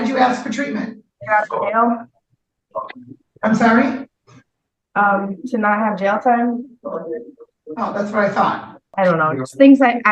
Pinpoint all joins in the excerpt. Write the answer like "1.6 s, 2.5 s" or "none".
1.1 s, 8.8 s